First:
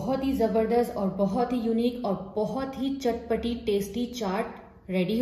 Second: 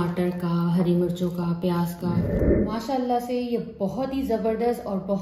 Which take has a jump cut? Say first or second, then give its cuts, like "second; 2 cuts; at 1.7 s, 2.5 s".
second; 1 cut; at 2.4 s